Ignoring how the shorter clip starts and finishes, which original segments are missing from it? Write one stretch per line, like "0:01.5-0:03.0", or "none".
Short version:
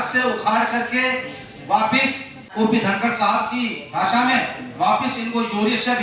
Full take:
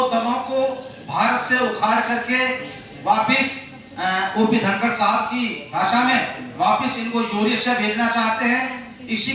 0:03.9-0:04.3

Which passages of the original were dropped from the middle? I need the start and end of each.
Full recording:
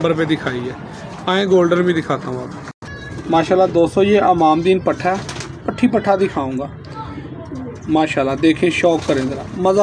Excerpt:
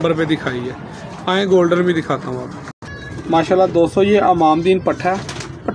none

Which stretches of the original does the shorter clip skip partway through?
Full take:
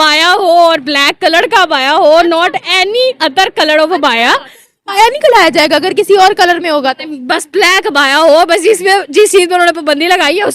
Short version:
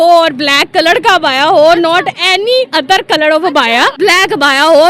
0:04.4-0:07.5

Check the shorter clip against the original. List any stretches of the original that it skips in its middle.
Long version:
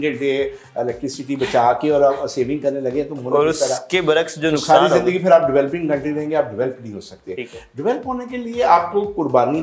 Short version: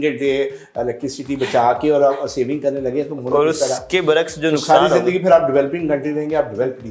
none

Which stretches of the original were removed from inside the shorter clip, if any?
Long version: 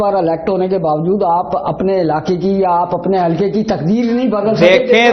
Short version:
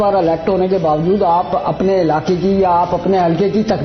none

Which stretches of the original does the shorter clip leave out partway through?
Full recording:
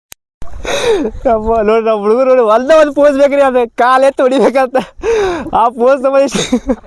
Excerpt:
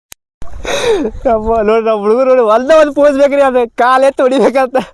none

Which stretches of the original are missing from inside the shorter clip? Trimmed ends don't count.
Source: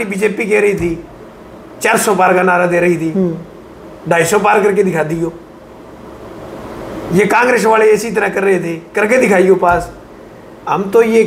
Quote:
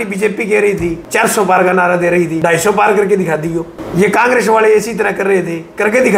0:01.0-0:01.7
0:03.1-0:04.0
0:05.4-0:06.9

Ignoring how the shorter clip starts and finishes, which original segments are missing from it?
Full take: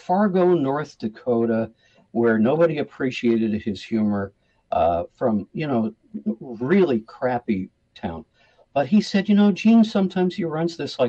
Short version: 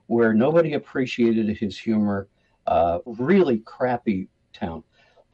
0:05.1-0:06.5

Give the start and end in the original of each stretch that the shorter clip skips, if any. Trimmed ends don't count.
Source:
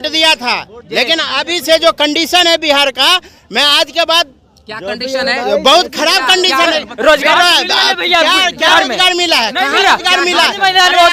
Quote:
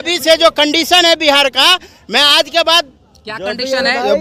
none

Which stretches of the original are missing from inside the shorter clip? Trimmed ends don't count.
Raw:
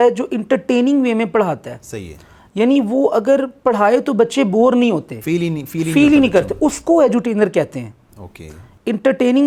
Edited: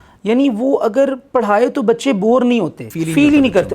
0:05.1-0:05.6

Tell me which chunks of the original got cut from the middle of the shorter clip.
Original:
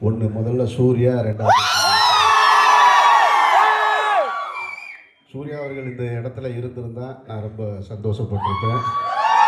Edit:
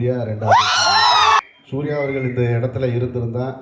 0:02.4-0:05.0

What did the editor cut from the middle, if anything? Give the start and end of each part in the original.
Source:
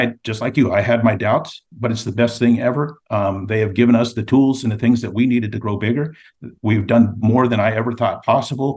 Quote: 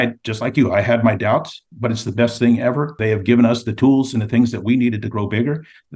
0:03.0-0:03.5

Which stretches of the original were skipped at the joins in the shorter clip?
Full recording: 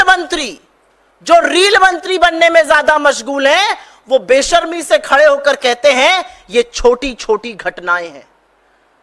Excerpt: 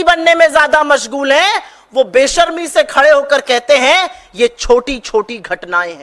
none

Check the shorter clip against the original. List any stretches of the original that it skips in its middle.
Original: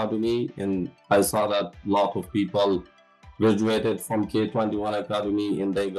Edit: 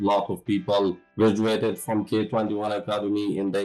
0:02.9-0:03.3

